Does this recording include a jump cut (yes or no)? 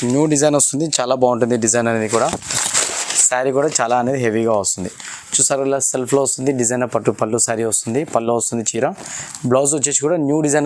no